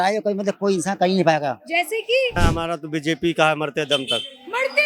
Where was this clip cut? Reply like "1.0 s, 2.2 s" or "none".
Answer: 2.3 s